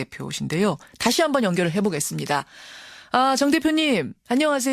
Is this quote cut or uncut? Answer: cut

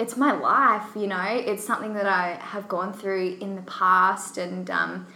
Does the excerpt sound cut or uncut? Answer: uncut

